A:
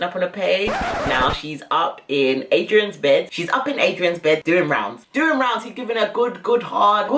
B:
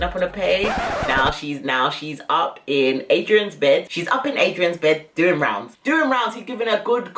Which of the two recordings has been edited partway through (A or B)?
A